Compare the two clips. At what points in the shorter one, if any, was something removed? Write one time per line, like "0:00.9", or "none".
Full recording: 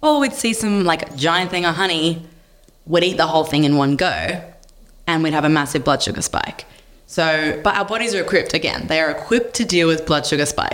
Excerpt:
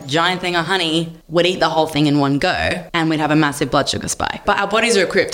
0:01.2
0:02.8
0:04.4

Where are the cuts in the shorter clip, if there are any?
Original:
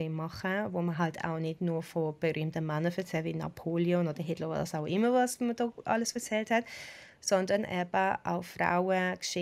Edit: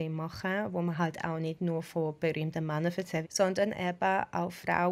0:03.3

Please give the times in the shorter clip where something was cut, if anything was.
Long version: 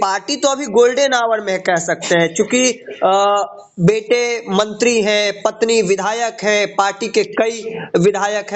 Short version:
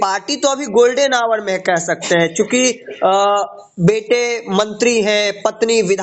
none

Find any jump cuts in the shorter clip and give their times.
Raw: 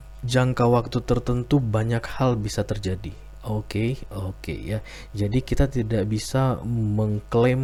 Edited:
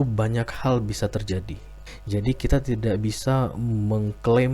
0:01.8

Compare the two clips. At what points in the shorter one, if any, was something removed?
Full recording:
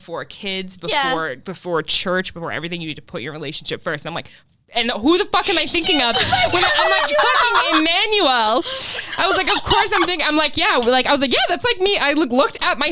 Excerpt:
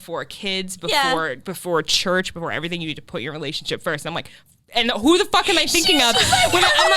none

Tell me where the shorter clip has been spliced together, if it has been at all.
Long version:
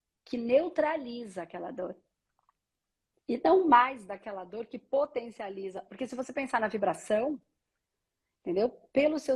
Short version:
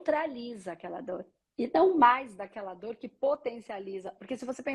0:01.4

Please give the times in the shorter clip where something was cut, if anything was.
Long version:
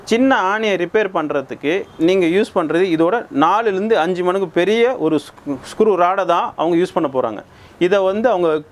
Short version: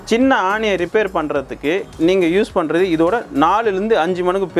none

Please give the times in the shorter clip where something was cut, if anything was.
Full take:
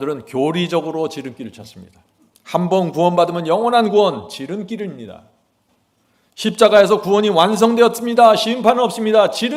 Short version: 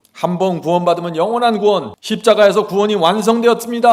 0:01.9

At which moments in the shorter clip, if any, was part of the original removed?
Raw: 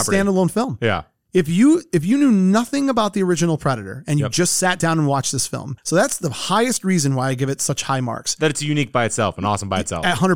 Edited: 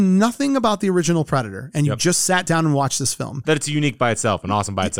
0:03.3

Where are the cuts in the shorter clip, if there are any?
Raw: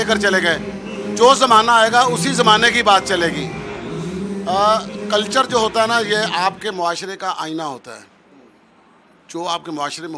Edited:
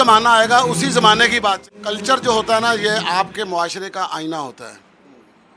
0:01.6

